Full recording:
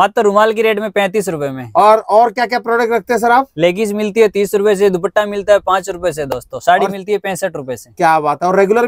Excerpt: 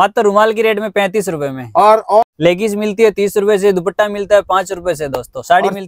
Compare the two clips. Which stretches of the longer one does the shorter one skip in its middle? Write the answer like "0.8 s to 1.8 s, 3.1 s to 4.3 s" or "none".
2.3 s to 3.5 s